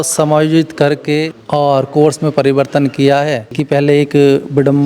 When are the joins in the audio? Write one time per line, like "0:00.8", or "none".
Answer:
0:01.4
0:03.5